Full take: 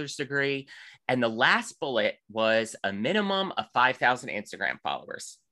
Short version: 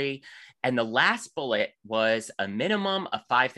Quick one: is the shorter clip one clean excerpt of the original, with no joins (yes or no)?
yes